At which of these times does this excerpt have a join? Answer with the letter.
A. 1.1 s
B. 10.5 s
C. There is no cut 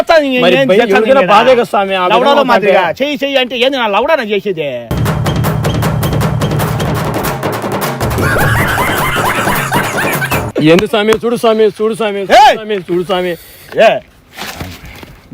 B